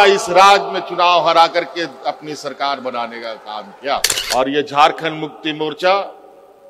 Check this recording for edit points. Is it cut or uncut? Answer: cut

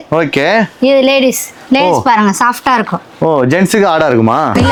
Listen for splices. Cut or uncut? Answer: uncut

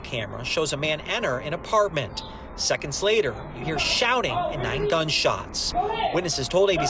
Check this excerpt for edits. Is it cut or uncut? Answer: uncut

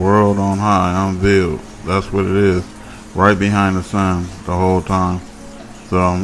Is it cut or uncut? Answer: uncut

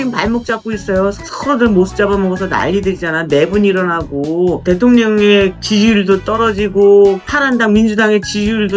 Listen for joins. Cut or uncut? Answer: cut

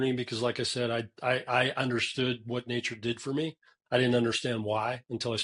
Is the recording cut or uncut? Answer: uncut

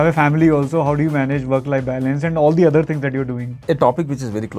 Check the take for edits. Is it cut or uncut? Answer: cut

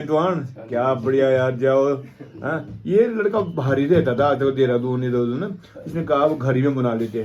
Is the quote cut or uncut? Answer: uncut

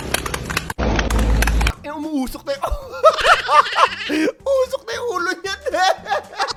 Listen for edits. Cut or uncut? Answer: uncut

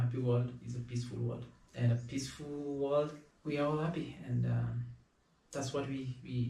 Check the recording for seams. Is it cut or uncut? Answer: cut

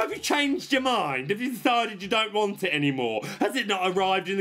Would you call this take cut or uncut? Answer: uncut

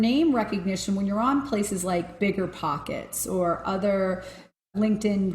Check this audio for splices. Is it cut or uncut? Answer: cut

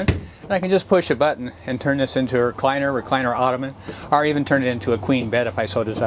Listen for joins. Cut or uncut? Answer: uncut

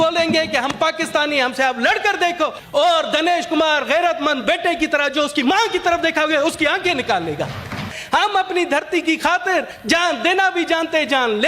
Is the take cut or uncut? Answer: cut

